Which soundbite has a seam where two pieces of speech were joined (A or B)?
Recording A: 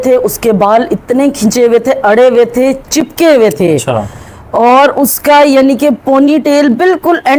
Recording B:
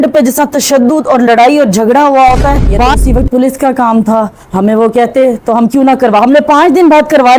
B